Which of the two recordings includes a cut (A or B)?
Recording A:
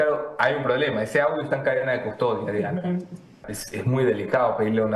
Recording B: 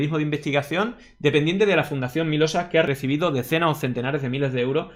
A